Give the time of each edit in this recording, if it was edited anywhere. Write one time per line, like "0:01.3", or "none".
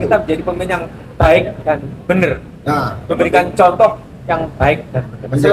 none